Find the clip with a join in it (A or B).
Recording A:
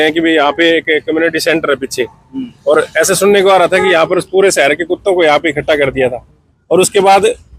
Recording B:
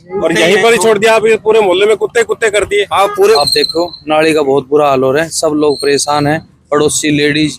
B